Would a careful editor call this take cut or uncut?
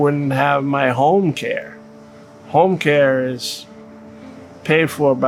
uncut